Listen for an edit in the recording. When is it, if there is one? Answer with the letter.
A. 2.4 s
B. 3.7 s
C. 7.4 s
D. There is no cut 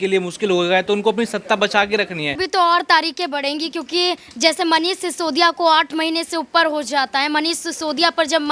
A